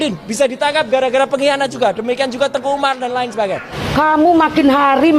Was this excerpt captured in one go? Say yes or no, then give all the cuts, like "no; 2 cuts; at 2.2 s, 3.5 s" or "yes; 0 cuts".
no; 1 cut; at 3.7 s